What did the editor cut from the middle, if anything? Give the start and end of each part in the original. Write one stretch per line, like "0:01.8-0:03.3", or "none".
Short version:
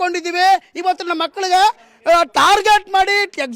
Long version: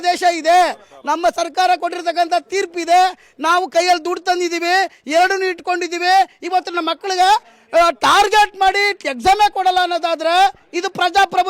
none